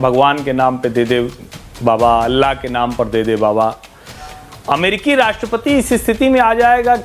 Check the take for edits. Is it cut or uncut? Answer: uncut